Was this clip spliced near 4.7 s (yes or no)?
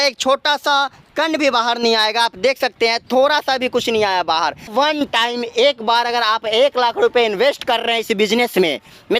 yes